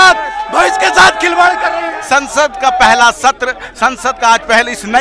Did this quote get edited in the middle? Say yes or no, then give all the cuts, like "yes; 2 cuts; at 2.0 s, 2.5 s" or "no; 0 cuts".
yes; 1 cut; at 1.9 s